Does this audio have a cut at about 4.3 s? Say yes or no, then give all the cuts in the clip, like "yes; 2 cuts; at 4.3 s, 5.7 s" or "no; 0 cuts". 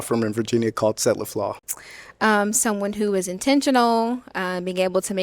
no; 1 cut; at 1.7 s